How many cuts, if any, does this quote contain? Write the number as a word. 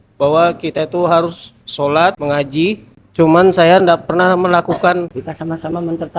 two